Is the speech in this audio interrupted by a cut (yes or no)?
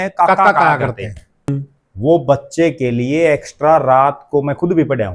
yes